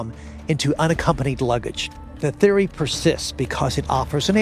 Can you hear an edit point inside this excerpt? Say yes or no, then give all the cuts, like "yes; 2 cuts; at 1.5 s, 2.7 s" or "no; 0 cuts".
yes; 1 cut; at 2.2 s